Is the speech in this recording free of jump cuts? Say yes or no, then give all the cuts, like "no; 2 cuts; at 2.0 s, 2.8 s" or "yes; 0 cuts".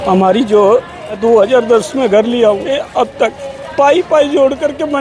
no; 2 cuts; at 1.2 s, 2.8 s